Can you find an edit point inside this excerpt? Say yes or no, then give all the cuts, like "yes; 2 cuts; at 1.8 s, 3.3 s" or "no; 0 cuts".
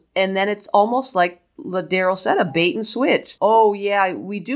yes; 1 cut; at 3.3 s